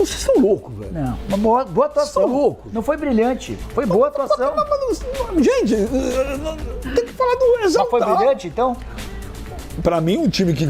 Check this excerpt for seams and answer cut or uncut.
uncut